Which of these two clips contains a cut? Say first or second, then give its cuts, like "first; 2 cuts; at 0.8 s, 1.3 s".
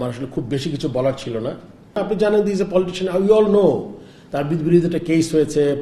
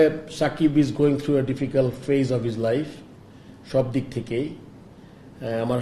first; 1 cut; at 2.0 s